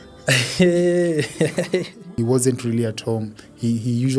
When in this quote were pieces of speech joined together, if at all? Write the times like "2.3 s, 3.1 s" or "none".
2.0 s